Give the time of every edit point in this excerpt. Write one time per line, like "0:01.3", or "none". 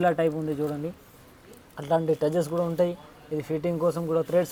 none